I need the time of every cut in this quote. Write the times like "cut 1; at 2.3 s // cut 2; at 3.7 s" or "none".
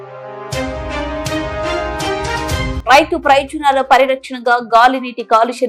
none